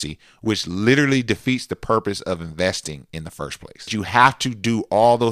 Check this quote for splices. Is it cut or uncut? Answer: cut